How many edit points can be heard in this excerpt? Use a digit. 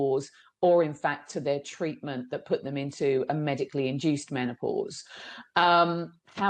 0